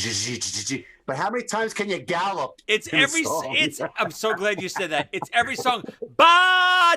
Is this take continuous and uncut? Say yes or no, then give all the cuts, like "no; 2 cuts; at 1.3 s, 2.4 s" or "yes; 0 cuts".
yes; 0 cuts